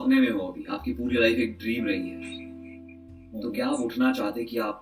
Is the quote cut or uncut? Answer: uncut